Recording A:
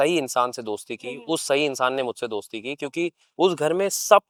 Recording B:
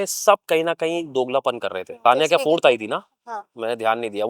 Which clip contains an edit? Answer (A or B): B